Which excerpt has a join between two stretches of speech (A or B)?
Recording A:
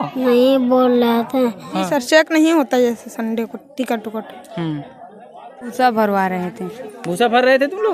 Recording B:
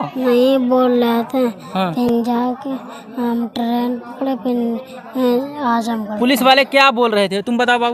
A